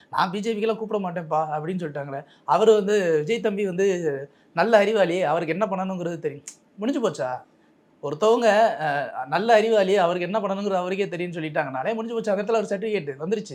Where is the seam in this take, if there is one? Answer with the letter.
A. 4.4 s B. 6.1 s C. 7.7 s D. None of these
D